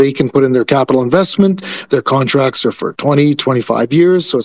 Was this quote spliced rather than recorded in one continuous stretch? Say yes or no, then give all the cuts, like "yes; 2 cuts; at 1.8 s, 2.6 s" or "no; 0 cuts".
no; 0 cuts